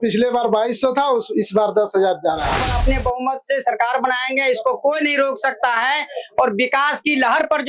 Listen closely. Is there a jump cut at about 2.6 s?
yes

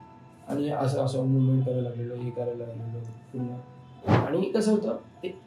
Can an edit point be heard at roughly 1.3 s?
no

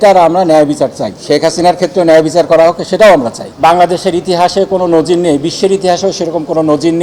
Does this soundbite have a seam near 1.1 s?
yes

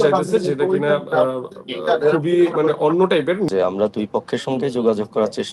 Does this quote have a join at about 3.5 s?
yes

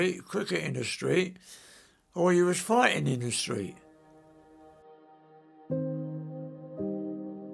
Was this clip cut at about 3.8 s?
yes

